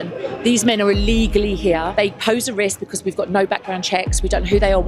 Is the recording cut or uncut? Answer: cut